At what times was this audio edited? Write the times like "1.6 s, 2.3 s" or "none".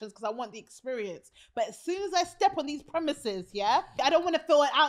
4.0 s